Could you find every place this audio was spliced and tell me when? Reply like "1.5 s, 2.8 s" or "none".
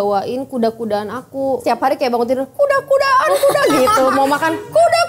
1.6 s